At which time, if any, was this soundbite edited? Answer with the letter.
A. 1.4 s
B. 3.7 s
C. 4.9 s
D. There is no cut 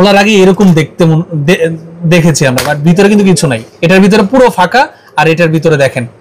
B